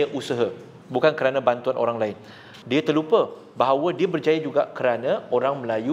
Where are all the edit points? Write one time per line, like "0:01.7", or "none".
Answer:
0:02.5

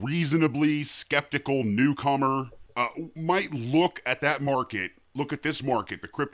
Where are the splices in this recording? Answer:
0:02.6

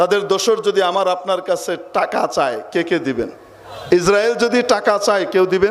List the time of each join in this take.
0:03.7

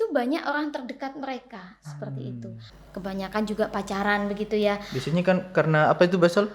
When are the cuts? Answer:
0:02.7

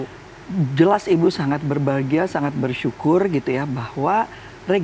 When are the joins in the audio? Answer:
none

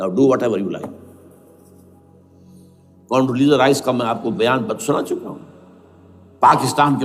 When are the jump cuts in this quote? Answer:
none

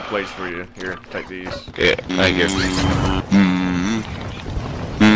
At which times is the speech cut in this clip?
0:02.1
0:03.2

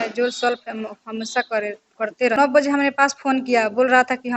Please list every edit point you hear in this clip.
0:02.4

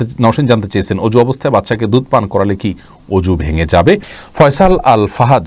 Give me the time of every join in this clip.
0:04.2

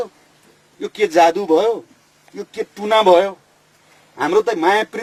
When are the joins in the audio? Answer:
none

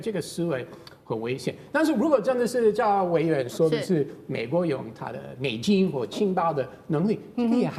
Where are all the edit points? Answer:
none

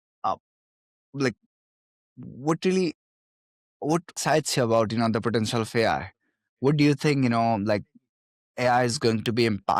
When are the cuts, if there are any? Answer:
0:04.2

